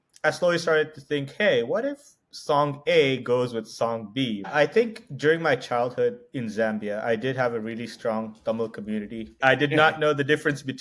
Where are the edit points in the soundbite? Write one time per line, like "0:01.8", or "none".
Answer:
0:04.5
0:09.4